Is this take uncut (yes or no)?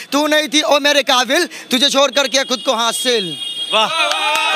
yes